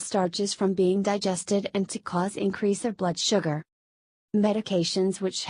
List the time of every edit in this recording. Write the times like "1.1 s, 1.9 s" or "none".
3.6 s